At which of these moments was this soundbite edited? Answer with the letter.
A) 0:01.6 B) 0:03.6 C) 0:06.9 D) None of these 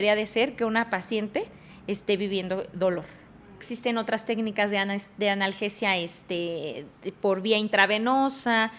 B